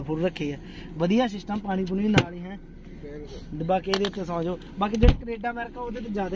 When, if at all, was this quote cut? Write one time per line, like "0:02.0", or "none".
none